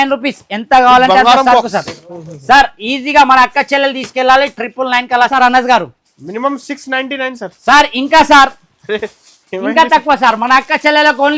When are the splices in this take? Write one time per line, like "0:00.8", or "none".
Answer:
0:05.3